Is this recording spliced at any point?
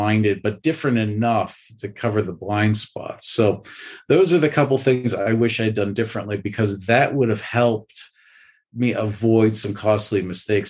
no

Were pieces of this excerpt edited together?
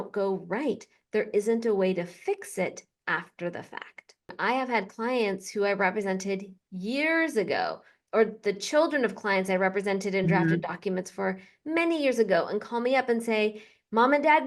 yes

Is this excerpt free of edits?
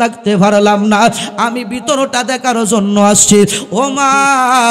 yes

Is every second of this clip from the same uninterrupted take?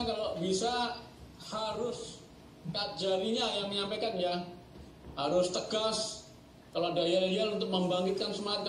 yes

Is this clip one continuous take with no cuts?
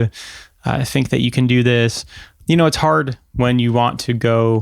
no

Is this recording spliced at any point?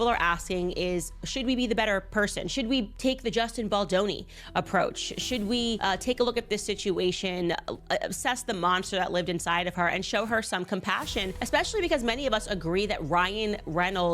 yes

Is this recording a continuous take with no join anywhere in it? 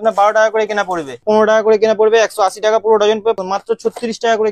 no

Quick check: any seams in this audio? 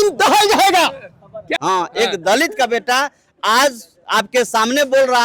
yes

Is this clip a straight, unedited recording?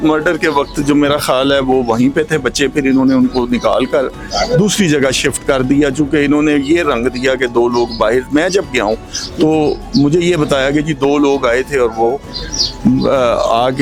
yes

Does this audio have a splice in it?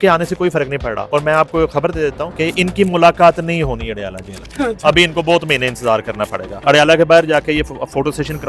yes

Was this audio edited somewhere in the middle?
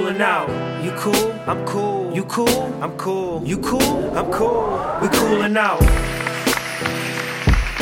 no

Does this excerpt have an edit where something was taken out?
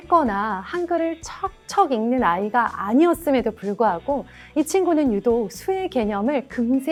no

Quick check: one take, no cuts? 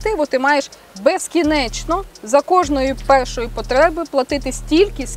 yes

